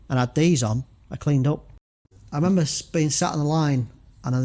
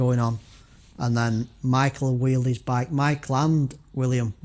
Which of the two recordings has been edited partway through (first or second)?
first